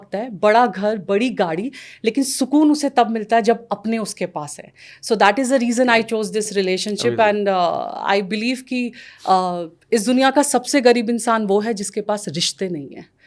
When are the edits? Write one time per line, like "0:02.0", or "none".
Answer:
none